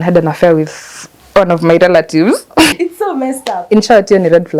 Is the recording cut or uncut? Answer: cut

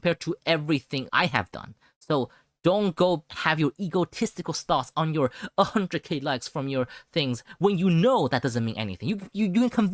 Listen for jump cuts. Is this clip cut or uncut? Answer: cut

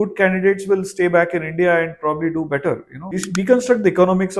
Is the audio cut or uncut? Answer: cut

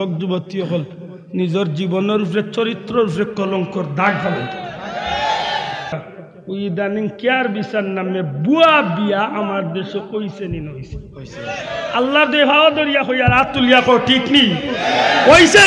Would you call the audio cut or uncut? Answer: cut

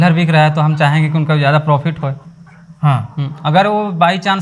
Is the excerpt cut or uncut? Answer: uncut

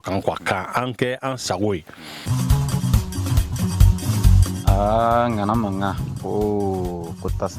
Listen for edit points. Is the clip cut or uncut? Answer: cut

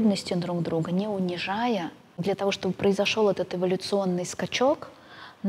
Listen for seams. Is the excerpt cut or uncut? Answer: cut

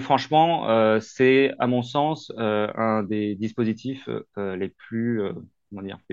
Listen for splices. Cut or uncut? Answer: uncut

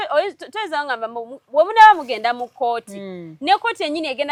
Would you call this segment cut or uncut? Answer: uncut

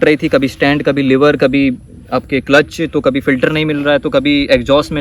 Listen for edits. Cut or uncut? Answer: uncut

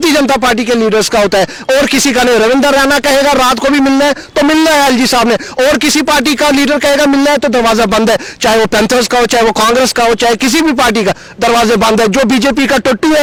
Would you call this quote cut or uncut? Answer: uncut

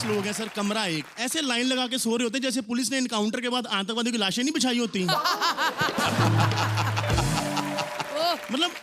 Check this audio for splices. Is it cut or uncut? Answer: cut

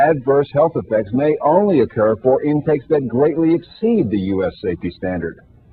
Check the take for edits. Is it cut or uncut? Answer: uncut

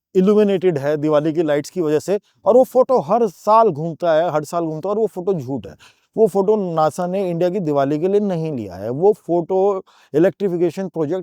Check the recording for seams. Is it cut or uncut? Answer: uncut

